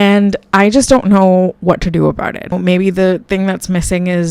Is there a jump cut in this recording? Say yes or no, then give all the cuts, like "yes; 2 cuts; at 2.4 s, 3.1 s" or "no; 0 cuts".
yes; 1 cut; at 2.6 s